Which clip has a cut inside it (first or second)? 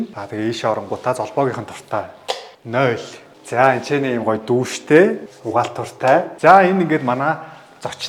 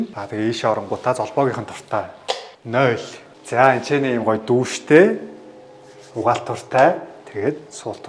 first